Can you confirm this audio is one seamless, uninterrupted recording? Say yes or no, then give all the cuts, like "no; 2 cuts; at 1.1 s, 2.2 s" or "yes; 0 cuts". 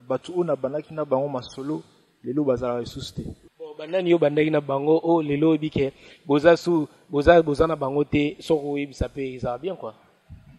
no; 1 cut; at 3.4 s